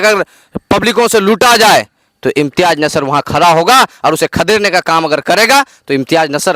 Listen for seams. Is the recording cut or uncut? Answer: uncut